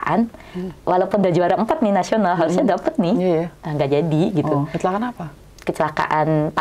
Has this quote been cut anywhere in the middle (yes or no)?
no